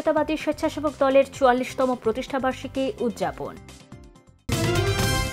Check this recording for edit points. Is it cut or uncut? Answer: cut